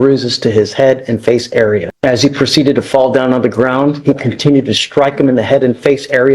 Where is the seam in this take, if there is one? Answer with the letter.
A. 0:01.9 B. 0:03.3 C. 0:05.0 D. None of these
A